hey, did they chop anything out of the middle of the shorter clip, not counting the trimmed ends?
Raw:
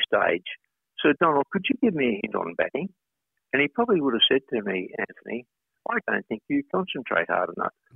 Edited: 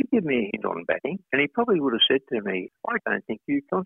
yes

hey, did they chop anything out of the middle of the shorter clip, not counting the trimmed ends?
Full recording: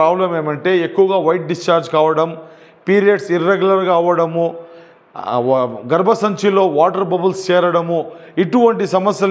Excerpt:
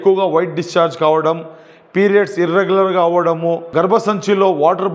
yes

